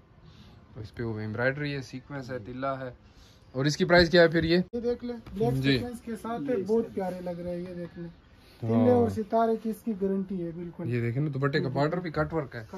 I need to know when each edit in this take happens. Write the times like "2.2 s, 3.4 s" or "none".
4.7 s